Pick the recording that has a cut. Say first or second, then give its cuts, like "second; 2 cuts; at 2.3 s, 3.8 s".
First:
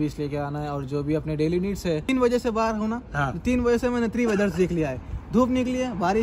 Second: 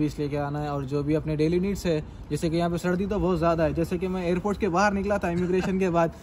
first; 1 cut; at 2.1 s